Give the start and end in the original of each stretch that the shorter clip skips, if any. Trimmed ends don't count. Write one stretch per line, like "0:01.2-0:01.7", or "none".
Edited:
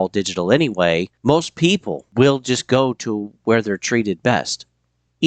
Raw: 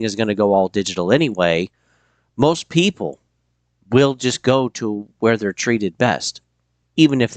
0:01.7-0:02.3
0:03.1-0:03.7